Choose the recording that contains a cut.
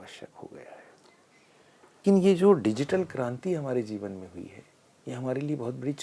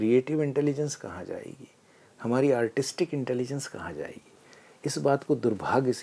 first; 1 cut; at 2.0 s

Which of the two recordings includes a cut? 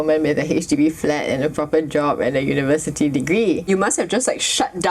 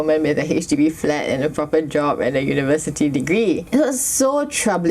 first; 1 cut; at 3.7 s

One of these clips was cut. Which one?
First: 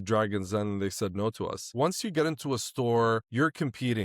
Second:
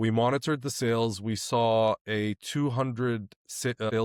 first; 1 cut; at 1.6 s

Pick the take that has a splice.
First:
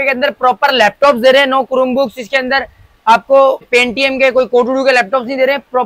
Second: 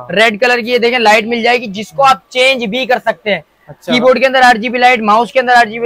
first; 1 cut; at 3.6 s

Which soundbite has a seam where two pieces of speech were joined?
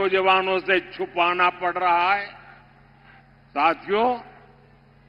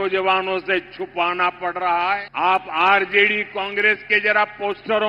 second; 1 cut; at 2.3 s

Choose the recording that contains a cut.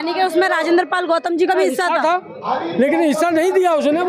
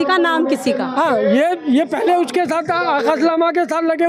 first; 1 cut; at 2.1 s

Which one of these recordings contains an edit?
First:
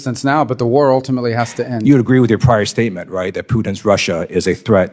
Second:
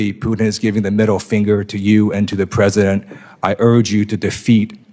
first; 1 cut; at 1.7 s

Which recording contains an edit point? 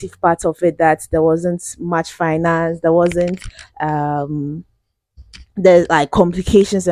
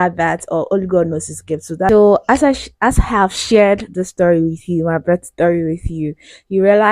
second; 1 cut; at 1.9 s

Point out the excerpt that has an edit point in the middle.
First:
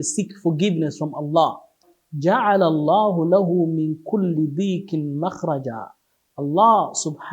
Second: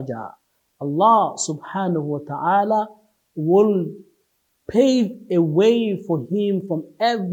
first; 1 cut; at 1.8 s

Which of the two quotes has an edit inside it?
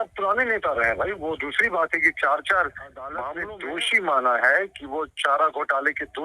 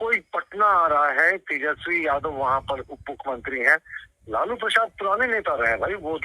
first; 1 cut; at 3.3 s

